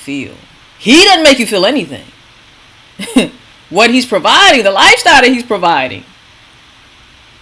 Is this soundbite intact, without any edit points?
yes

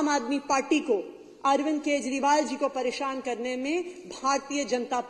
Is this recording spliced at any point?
no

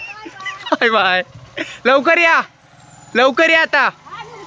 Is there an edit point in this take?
no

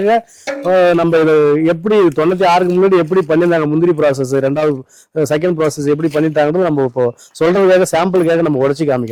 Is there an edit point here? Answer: no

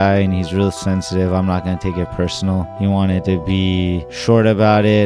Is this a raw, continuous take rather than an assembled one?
yes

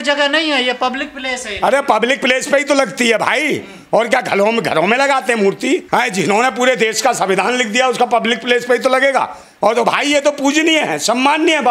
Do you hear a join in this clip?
yes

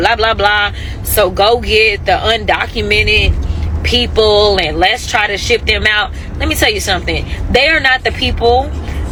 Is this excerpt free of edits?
yes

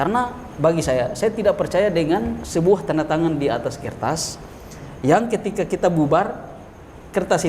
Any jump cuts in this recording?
no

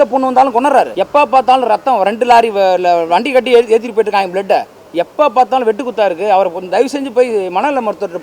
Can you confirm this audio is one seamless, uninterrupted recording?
no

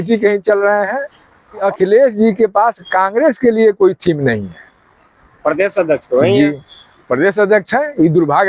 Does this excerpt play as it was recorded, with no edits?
no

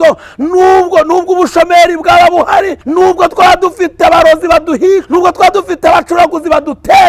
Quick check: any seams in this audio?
yes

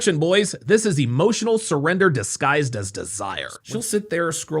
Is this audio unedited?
no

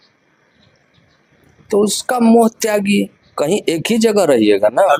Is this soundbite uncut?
yes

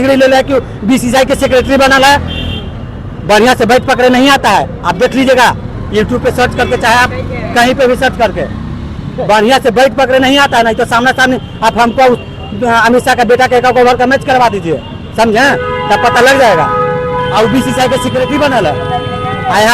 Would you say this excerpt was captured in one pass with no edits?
yes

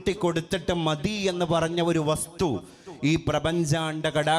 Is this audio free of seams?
yes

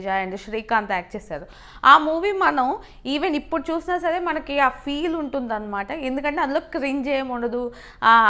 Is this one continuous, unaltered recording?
yes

